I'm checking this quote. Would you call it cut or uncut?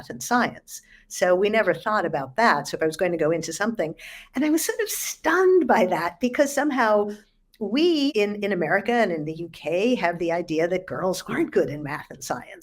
cut